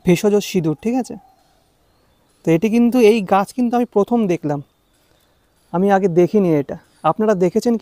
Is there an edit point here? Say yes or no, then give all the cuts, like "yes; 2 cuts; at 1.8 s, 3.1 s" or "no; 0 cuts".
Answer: no; 0 cuts